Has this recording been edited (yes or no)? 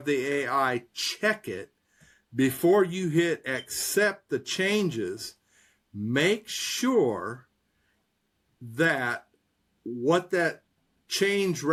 no